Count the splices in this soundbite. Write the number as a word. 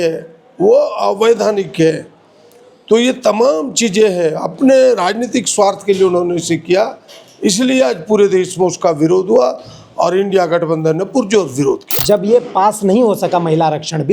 one